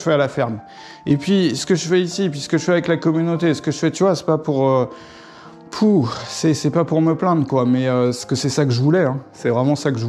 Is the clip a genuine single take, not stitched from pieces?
yes; 0 cuts

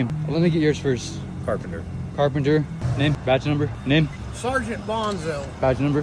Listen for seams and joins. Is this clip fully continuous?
yes; 0 cuts

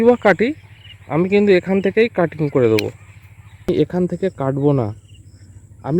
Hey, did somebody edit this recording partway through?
yes; 1 cut; at 3.7 s

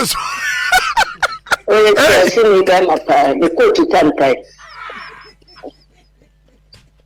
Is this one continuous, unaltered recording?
yes; 0 cuts

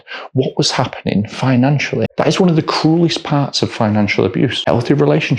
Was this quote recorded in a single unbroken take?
no; 2 cuts; at 2.1 s, 4.6 s

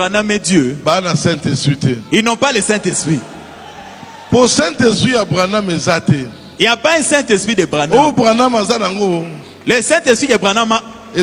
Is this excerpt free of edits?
yes; 0 cuts

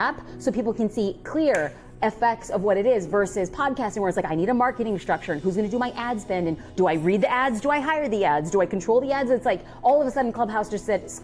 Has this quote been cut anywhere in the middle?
no; 0 cuts

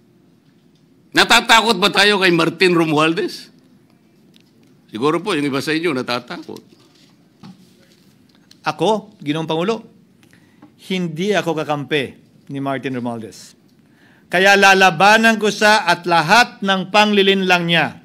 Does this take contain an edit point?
yes; 1 cut; at 7.4 s

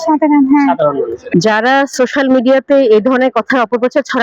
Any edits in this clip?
yes; 1 cut; at 1.3 s

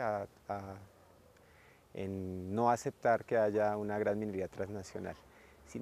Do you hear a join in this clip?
no; 0 cuts

